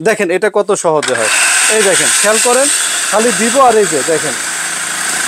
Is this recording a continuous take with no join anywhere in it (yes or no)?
yes